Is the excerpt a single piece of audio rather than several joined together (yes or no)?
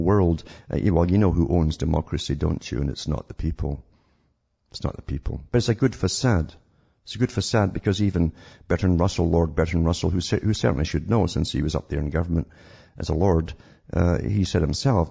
yes